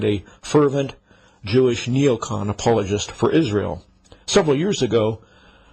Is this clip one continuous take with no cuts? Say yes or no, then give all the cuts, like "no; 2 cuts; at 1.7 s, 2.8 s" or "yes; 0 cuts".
yes; 0 cuts